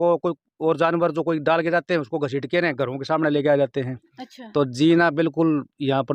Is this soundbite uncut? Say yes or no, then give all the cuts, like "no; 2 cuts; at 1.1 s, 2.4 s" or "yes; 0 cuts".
yes; 0 cuts